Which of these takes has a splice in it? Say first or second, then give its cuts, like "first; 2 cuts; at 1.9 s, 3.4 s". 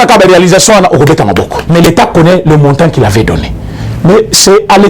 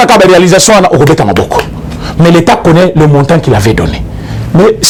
first; 1 cut; at 1.6 s